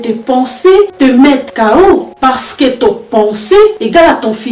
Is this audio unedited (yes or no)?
yes